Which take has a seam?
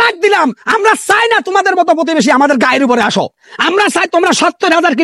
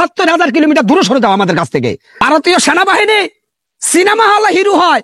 second; 1 cut; at 2.1 s

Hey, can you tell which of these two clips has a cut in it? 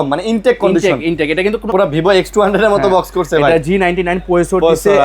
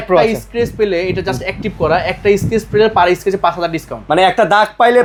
first; 1 cut; at 1.7 s

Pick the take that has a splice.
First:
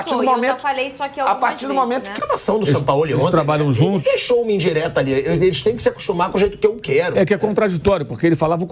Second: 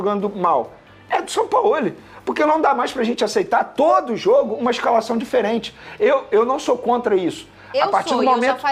first; 1 cut; at 2.2 s

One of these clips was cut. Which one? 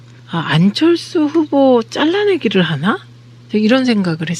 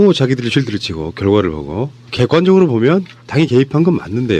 first; 1 cut; at 3.1 s

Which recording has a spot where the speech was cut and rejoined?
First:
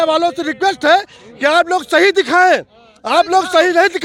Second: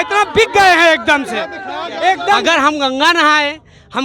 second; 1 cut; at 2.4 s

